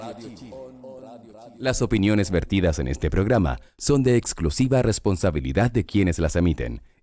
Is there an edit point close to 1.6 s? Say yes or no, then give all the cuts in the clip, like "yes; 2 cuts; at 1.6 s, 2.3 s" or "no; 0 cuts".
yes; 1 cut; at 1.6 s